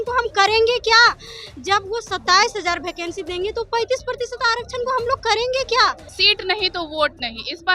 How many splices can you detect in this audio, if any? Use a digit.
1